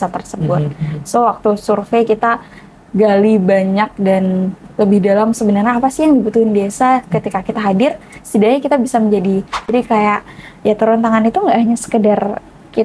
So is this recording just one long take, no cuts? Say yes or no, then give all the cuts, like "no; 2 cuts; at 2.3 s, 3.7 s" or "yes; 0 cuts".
no; 1 cut; at 9.7 s